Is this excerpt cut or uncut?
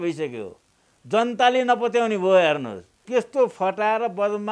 cut